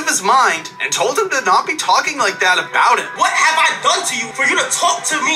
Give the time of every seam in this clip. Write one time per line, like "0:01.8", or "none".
0:03.1
0:04.2